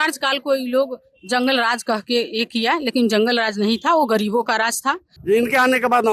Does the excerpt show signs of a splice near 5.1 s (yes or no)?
yes